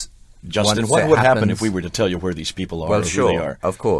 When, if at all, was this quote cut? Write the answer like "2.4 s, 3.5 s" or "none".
none

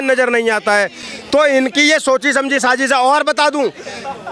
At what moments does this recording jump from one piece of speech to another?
none

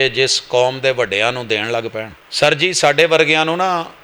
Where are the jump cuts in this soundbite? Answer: 2.2 s

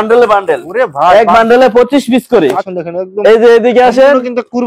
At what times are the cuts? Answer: 2.7 s

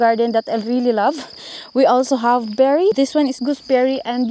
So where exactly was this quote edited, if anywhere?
2.9 s

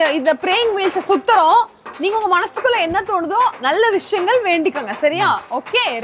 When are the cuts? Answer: none

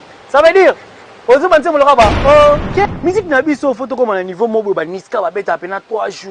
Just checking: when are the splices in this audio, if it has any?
2.8 s

